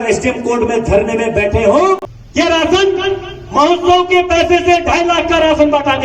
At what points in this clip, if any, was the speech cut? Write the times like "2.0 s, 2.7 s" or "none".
2.0 s